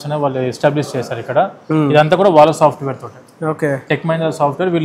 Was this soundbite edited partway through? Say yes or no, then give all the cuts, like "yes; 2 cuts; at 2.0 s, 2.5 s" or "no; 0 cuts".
no; 0 cuts